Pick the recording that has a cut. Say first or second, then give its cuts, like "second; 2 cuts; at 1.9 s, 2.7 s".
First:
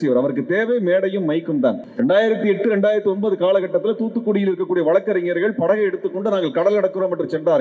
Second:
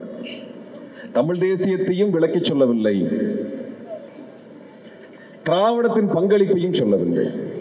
first; 1 cut; at 1.9 s